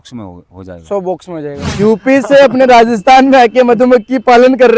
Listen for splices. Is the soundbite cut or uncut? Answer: cut